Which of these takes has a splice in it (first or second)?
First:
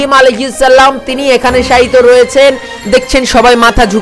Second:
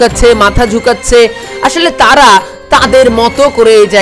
first